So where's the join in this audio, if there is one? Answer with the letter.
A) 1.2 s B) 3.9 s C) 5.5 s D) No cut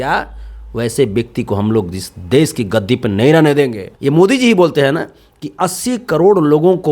B